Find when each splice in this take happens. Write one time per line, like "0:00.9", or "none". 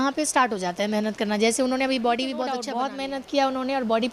0:02.6